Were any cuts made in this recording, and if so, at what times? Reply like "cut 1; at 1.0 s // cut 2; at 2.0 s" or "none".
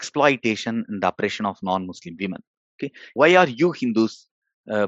cut 1; at 3.2 s